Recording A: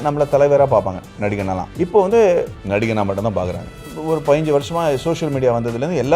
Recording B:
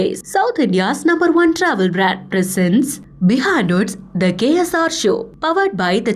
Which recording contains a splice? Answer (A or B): A